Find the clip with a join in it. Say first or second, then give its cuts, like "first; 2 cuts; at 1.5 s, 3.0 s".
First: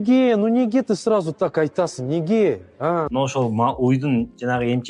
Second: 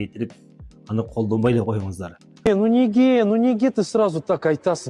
first; 1 cut; at 3.1 s